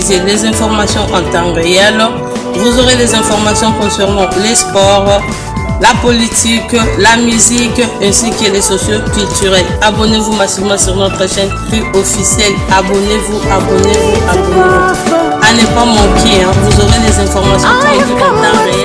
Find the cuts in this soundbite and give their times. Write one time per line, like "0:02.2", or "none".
none